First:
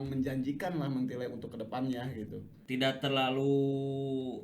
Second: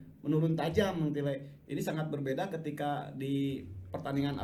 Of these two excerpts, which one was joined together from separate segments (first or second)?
first